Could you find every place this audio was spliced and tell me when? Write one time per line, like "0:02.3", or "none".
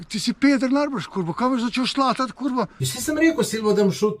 0:02.9